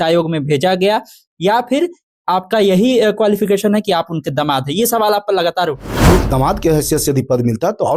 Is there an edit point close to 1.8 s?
no; 1 cut; at 5.9 s

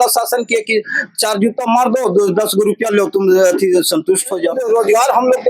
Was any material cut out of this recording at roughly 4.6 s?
yes; 1 cut; at 4.6 s

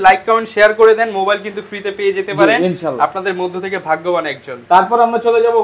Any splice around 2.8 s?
no; 0 cuts

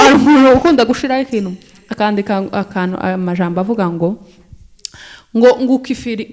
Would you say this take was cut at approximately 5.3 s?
no; 0 cuts

